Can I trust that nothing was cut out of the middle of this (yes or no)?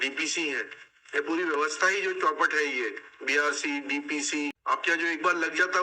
no